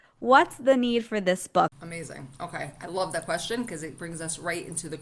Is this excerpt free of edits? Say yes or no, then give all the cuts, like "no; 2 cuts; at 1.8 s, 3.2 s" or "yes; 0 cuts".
no; 1 cut; at 1.7 s